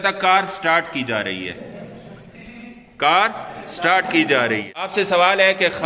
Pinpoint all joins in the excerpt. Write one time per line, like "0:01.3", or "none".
0:04.8